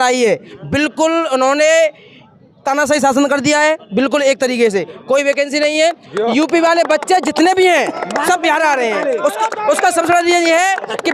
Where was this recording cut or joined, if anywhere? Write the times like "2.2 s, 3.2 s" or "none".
none